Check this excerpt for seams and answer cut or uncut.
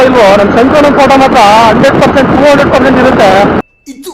uncut